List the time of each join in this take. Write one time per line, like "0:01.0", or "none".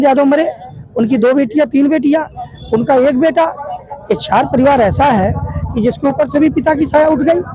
none